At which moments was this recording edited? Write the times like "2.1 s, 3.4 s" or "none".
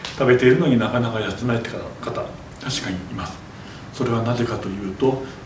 none